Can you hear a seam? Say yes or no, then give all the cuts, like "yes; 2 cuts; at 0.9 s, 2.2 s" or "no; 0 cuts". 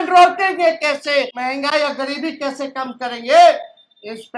yes; 1 cut; at 1.3 s